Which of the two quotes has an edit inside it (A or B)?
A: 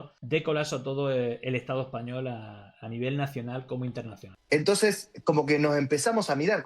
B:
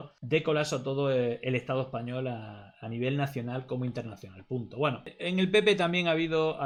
A